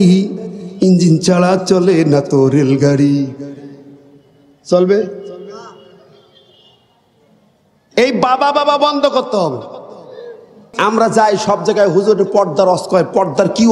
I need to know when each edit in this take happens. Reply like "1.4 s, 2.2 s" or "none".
10.6 s